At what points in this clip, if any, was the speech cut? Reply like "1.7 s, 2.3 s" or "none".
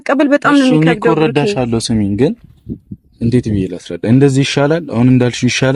none